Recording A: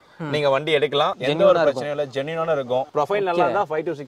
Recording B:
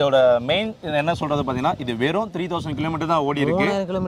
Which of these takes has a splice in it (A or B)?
A